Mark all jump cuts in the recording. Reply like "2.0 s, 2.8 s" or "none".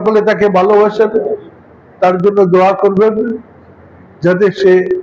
none